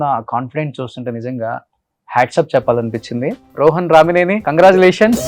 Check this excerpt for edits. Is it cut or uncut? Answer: cut